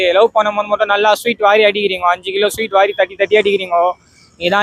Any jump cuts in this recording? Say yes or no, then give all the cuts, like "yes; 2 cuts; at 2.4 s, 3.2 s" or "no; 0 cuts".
no; 0 cuts